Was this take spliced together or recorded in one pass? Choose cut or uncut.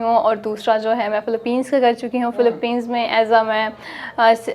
uncut